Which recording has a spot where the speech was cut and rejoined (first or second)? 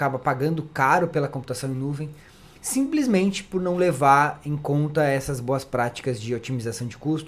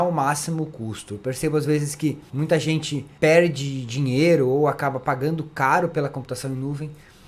second